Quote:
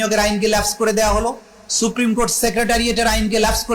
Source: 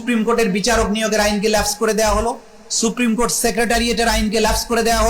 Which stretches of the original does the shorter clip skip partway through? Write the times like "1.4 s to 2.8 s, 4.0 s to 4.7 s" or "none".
none